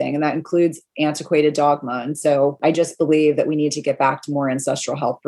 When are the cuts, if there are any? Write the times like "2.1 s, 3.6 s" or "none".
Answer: 2.6 s